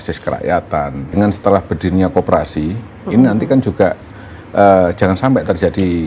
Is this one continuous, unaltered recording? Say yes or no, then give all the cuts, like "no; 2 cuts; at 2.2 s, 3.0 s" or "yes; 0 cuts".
no; 1 cut; at 1.1 s